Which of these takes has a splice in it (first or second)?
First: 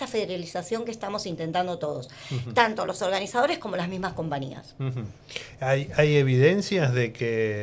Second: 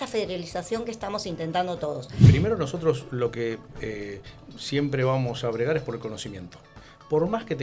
second